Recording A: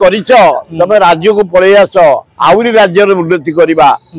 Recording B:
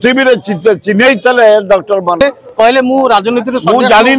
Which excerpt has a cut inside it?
B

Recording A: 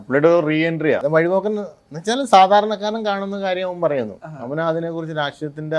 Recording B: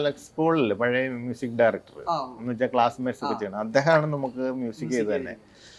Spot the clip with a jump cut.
A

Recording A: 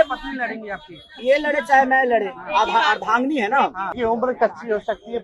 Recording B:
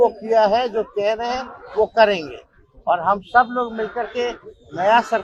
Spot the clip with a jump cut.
A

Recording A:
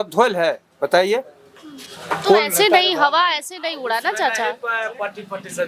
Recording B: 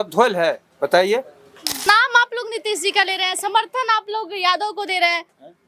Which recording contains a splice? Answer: B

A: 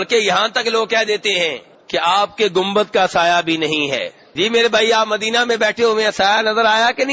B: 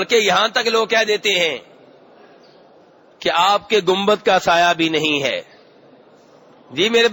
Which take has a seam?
A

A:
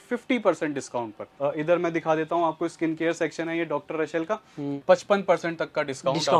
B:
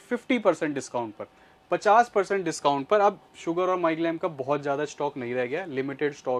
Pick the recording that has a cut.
A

